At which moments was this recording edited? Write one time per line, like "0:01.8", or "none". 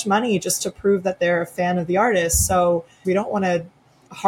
0:03.0